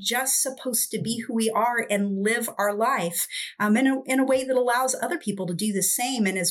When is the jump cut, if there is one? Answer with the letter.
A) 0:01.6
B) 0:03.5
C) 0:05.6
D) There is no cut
D